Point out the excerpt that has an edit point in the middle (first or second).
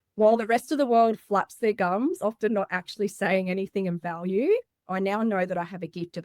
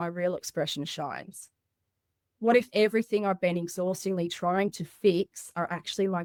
first